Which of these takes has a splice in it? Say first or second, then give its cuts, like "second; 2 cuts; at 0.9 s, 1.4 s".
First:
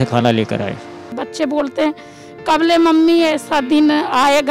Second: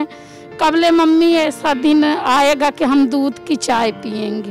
first; 1 cut; at 0.9 s